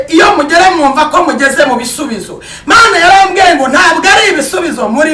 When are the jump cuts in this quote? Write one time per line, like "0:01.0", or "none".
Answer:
none